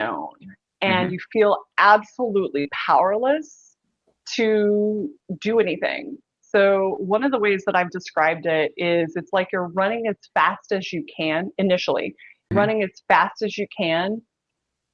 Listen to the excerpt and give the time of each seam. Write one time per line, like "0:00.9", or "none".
0:12.5